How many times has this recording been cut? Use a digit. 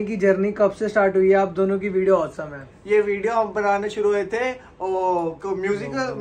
0